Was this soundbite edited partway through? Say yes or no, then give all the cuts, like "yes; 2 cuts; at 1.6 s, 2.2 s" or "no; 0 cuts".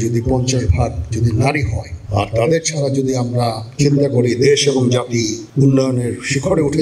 yes; 1 cut; at 5.4 s